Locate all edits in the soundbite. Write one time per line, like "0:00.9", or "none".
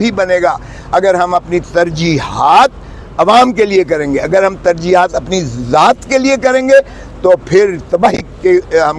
none